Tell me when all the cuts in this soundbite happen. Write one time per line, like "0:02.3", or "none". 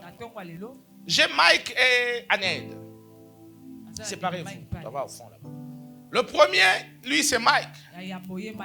none